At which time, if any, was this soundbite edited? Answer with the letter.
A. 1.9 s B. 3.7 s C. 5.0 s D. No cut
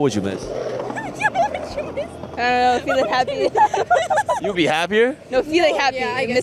D